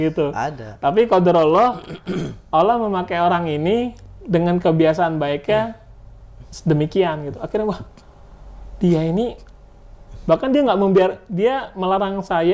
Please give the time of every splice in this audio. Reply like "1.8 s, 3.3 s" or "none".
none